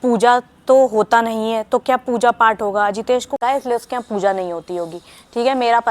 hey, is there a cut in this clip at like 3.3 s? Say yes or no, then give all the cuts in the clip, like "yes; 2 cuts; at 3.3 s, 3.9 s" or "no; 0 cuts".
yes; 1 cut; at 3.3 s